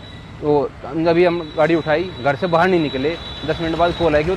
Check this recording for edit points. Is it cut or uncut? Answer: uncut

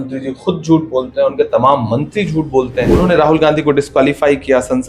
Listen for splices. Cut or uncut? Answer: cut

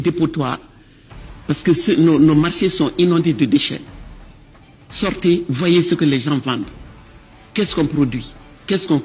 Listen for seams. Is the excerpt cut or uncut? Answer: uncut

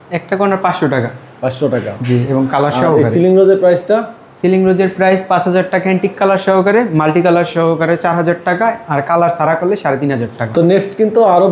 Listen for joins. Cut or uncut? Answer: uncut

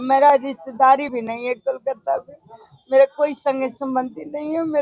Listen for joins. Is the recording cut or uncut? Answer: uncut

